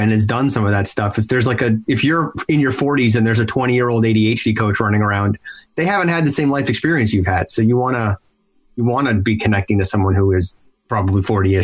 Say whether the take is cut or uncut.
cut